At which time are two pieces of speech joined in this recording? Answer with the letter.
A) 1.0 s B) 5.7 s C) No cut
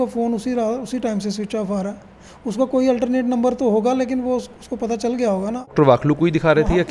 B